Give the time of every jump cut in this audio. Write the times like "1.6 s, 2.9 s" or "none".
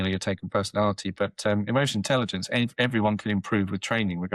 none